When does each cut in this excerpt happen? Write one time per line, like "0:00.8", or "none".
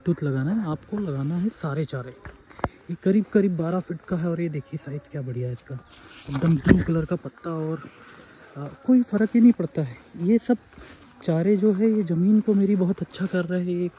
none

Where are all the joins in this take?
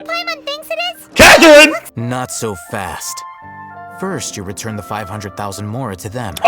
0:01.9

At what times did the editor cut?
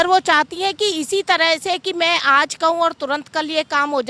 none

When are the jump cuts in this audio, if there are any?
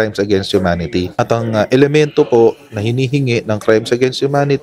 0:01.1

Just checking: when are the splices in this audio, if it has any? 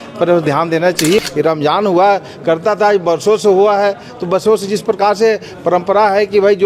0:01.2

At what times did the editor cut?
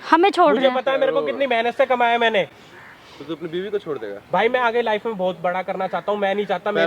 none

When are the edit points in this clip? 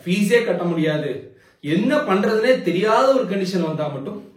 none

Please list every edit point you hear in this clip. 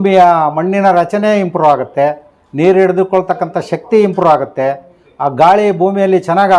none

